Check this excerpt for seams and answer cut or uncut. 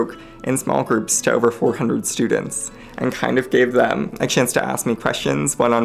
cut